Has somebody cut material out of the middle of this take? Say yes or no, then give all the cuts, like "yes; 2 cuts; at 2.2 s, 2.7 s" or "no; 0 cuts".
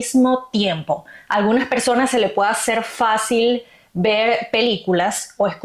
no; 0 cuts